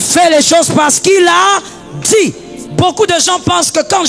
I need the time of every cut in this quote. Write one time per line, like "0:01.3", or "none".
0:02.5